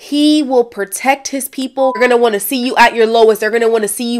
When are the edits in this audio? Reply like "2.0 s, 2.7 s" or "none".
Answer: 1.9 s